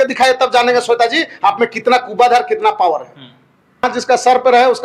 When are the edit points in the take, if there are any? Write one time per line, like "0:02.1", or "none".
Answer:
0:03.8